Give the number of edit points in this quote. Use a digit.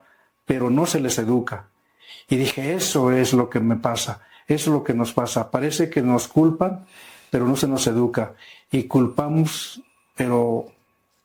0